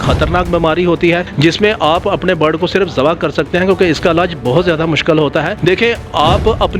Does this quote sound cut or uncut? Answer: cut